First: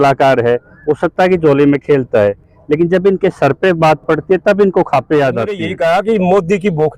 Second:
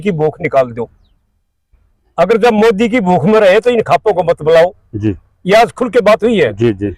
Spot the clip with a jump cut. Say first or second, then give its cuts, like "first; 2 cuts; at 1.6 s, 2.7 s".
first; 1 cut; at 5.6 s